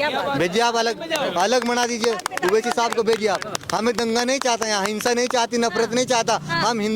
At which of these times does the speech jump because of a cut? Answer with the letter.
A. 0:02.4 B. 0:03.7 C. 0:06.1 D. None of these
D